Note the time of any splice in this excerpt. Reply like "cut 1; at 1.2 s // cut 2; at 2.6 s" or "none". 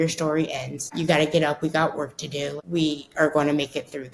cut 1; at 0.9 s // cut 2; at 2.6 s